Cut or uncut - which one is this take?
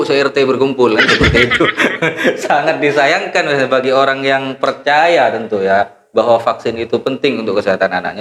uncut